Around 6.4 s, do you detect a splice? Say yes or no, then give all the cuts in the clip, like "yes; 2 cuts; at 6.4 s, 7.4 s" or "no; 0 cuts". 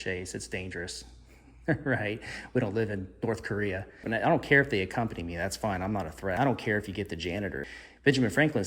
yes; 3 cuts; at 4.0 s, 6.4 s, 7.6 s